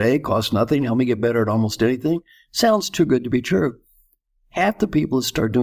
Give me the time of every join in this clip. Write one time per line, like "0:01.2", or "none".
none